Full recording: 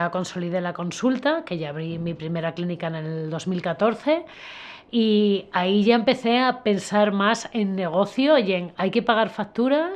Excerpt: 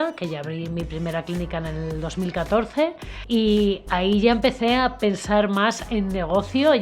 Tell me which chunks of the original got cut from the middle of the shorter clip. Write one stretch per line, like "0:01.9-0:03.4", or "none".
0:04.4-0:04.7